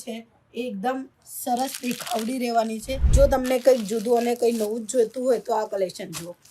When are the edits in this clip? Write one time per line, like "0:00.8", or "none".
0:03.0